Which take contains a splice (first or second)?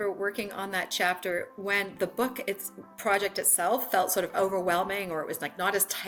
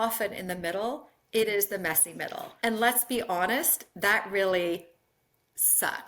second